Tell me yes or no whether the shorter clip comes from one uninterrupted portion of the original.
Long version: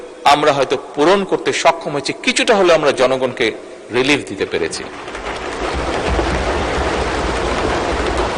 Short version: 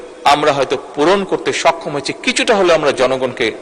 yes